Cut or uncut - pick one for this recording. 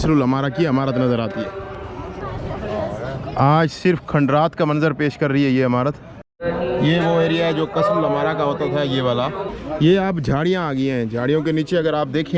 uncut